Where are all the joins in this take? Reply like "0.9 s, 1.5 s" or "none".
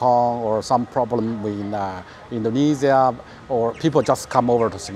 none